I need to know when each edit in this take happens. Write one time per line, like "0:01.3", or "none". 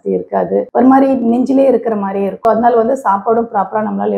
0:02.3